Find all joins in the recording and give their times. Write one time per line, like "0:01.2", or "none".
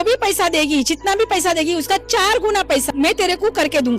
0:02.9